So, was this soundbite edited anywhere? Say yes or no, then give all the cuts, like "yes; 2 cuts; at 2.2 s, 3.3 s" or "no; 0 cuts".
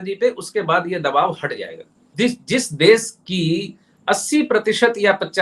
yes; 1 cut; at 2.1 s